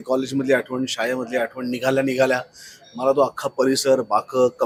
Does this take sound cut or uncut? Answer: uncut